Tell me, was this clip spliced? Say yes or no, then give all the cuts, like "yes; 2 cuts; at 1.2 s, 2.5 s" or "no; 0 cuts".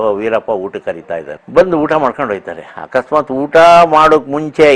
yes; 1 cut; at 1.4 s